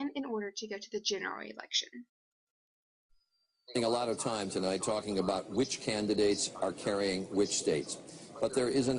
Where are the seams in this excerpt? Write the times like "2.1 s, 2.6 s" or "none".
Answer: 5.5 s